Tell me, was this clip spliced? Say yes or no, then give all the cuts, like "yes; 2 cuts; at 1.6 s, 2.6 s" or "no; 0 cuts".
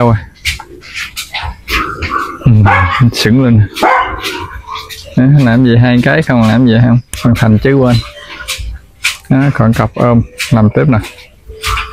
yes; 1 cut; at 7.1 s